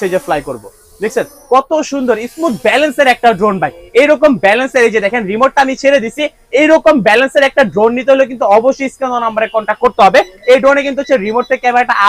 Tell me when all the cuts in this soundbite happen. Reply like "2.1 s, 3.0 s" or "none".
none